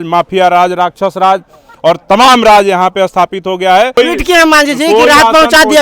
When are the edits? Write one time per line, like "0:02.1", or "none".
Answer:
0:04.0